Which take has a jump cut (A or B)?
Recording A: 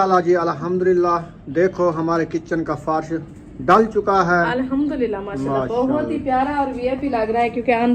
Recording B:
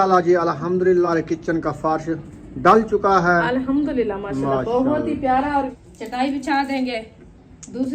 B